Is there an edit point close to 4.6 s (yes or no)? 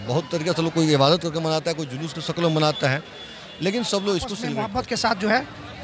yes